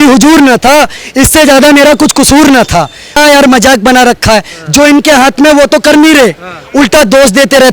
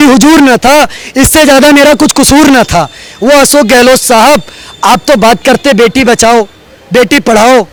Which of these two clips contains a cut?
first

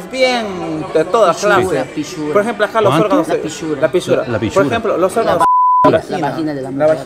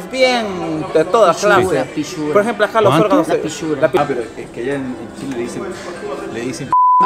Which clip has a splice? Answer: second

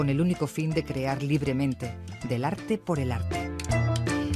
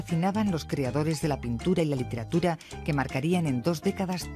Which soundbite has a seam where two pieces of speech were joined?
second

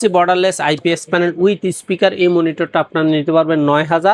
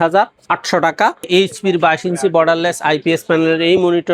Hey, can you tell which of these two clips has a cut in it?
second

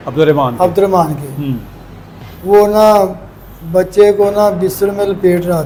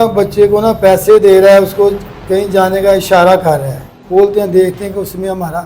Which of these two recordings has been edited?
second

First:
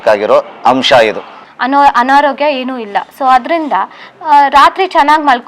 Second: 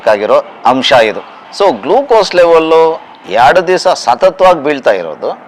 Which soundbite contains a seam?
first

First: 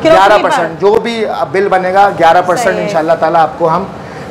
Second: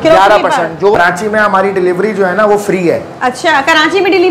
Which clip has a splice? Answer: second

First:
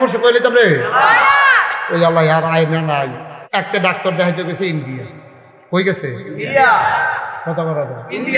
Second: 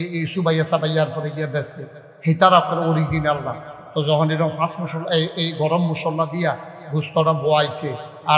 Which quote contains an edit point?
first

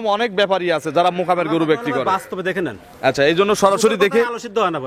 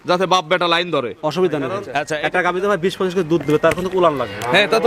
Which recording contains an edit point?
second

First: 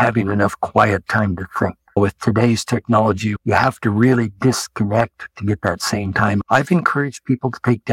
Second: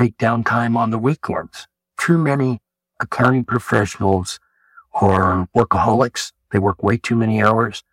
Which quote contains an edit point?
first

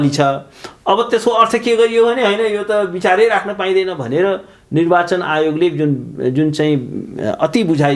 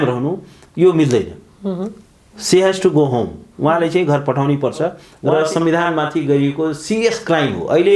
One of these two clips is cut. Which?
second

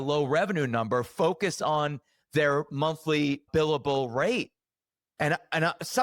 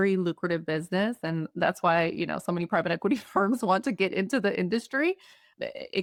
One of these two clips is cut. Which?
first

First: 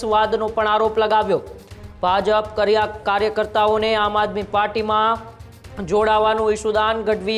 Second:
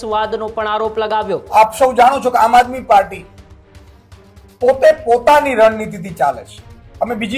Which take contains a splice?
second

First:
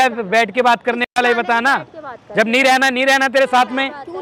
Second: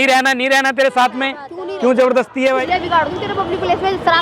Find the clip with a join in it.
second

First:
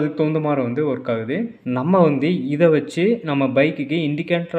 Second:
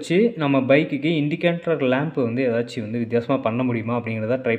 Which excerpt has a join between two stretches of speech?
first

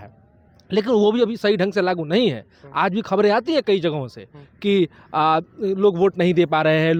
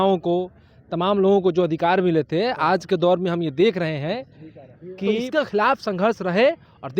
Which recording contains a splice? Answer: second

